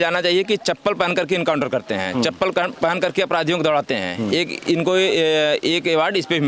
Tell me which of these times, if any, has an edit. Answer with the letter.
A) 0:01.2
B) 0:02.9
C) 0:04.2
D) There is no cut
D